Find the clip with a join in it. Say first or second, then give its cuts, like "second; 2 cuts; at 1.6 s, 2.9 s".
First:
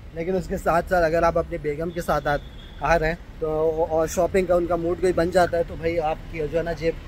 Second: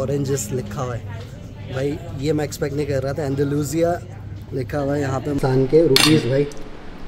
second; 1 cut; at 5.4 s